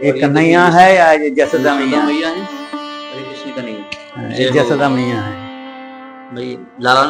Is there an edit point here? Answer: no; 0 cuts

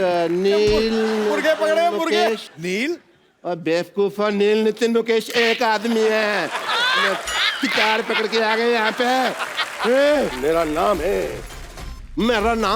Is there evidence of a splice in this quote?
yes; 1 cut; at 10.3 s

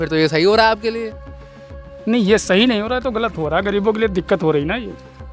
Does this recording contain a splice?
no; 0 cuts

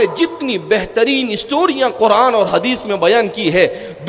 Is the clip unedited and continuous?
yes; 0 cuts

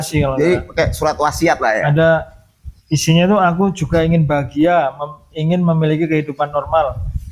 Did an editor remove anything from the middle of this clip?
no; 0 cuts

